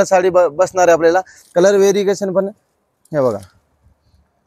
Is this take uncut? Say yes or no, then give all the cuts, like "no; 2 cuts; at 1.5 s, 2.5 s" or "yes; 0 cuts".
no; 1 cut; at 1.4 s